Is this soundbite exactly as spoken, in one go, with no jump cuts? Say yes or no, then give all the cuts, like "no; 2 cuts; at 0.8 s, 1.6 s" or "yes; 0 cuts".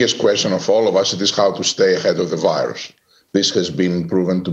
yes; 0 cuts